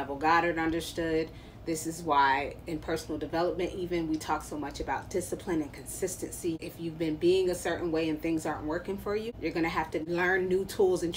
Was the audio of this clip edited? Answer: yes; 3 cuts; at 6.7 s, 9.3 s, 10.0 s

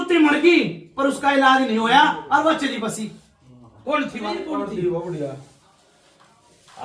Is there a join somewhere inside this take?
yes; 1 cut; at 4.5 s

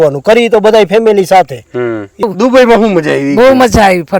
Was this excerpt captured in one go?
no; 1 cut; at 2.2 s

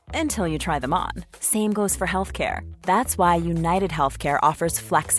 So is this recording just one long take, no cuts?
yes; 0 cuts

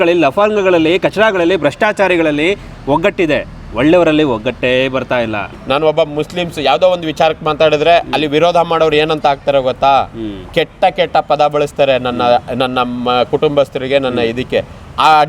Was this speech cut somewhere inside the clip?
yes; 1 cut; at 5.5 s

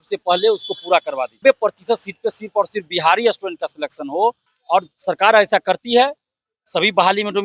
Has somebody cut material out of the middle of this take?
yes; 2 cuts; at 1.4 s, 4.5 s

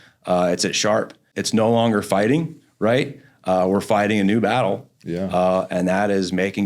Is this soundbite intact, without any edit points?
no; 1 cut; at 1.3 s

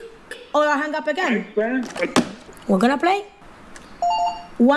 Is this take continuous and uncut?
yes; 0 cuts

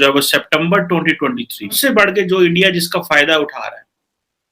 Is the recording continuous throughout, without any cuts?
no; 1 cut; at 1.8 s

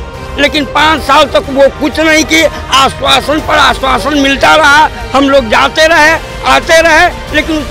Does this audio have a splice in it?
no; 0 cuts

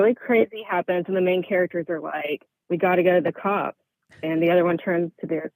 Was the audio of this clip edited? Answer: no; 0 cuts

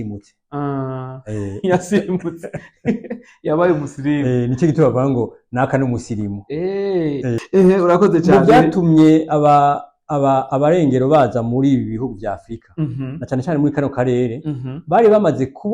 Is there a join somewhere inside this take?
yes; 1 cut; at 7.4 s

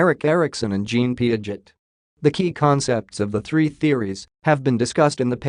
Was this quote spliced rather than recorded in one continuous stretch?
no; 0 cuts

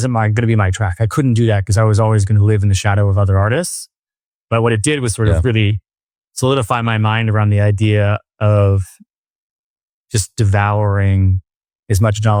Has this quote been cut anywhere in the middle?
no; 0 cuts

